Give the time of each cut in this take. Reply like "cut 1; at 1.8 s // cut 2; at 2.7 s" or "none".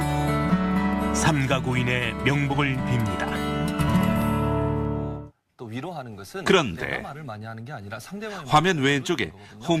none